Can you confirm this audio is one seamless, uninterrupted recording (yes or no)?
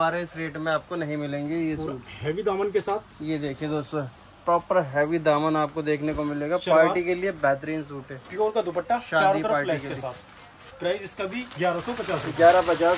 yes